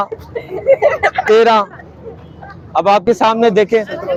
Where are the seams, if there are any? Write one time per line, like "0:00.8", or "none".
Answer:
none